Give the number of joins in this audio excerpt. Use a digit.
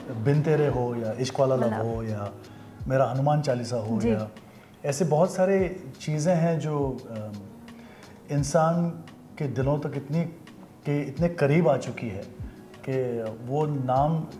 0